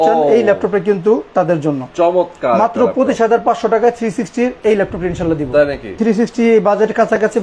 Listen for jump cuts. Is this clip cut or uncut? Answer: cut